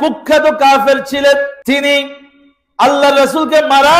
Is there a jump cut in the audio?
yes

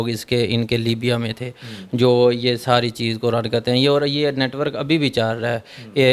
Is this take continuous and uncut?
yes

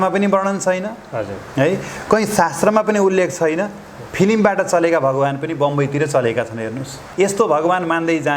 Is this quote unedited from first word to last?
no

